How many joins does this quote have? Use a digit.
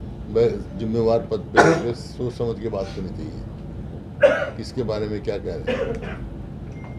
0